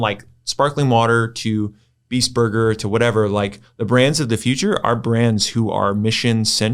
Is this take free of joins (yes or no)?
yes